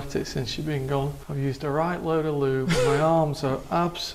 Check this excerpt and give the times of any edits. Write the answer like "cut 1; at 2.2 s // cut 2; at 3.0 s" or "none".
cut 1; at 1.2 s